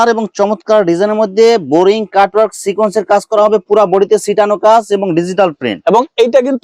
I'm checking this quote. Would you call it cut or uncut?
uncut